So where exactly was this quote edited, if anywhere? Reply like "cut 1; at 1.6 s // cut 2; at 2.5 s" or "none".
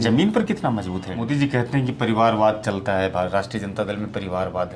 cut 1; at 1.1 s